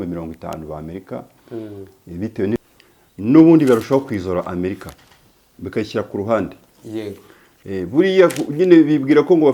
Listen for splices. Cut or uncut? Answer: cut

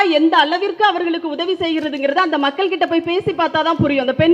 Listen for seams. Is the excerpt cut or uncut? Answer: uncut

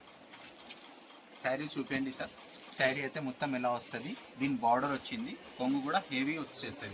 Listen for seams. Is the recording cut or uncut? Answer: uncut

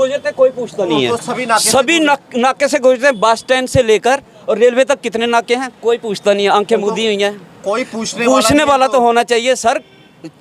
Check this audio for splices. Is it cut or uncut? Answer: uncut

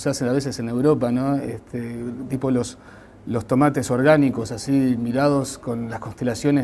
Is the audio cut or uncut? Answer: cut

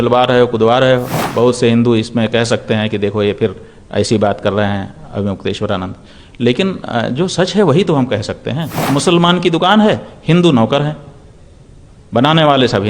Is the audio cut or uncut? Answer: cut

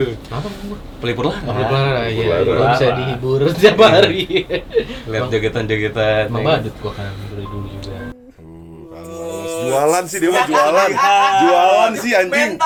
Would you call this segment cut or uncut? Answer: uncut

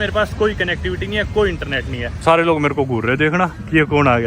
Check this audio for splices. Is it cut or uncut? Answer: cut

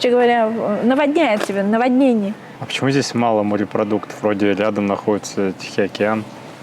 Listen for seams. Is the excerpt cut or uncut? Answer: cut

